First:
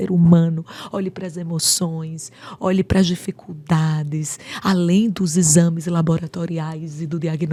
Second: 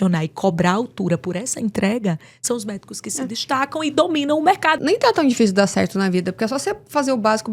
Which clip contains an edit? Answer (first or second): second